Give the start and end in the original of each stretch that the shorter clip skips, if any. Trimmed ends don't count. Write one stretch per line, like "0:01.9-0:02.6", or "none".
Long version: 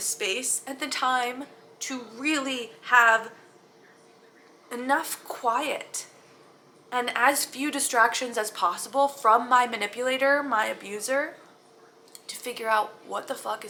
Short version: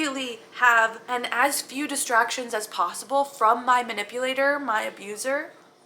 0:03.3-0:06.8

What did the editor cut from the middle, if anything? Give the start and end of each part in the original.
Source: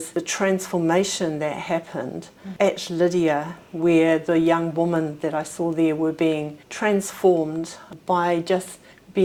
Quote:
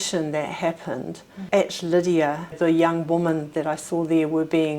0:03.6-0:04.2

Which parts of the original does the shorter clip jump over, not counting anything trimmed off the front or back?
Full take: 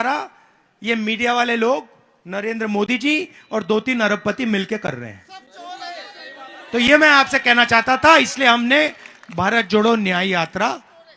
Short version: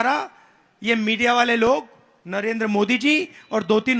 none

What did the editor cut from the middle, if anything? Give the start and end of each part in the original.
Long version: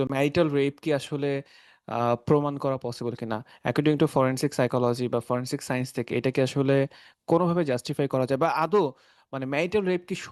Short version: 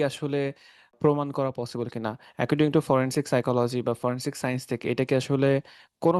0:01.8-0:02.2

